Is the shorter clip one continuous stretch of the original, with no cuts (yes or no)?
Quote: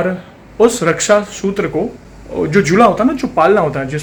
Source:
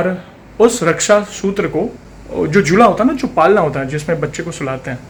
yes